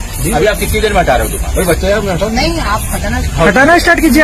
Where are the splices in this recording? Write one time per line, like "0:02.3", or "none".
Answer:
none